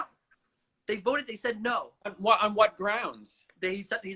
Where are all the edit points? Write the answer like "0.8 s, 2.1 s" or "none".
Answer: none